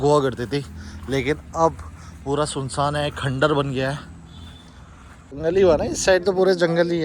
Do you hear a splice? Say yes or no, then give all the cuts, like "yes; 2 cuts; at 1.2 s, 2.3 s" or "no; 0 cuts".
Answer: yes; 1 cut; at 5.4 s